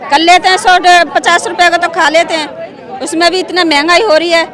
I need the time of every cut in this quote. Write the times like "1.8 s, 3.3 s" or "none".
none